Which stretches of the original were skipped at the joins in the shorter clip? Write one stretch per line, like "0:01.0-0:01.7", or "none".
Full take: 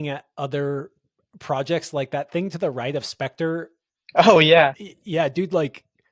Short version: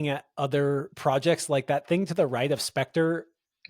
0:00.9-0:01.4